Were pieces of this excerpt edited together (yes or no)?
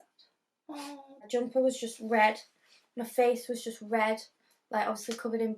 yes